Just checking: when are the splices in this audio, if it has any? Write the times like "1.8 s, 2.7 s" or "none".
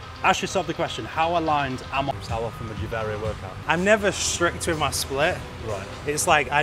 2.1 s, 3.5 s

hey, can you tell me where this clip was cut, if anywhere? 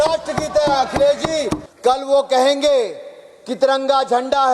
1.7 s

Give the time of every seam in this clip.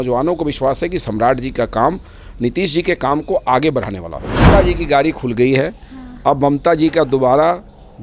4.4 s

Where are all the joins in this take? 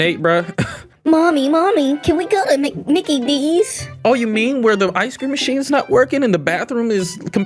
none

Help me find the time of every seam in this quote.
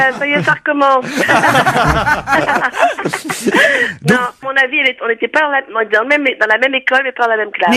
3.3 s

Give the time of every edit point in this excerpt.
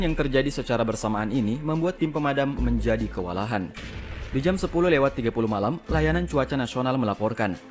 none

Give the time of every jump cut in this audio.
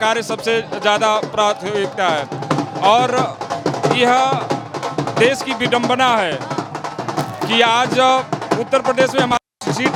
none

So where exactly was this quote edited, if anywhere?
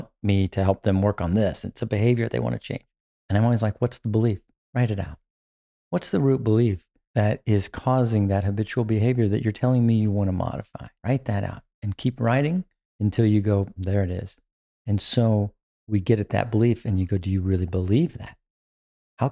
4.5 s

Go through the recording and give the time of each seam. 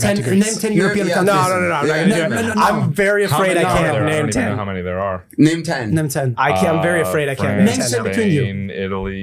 none

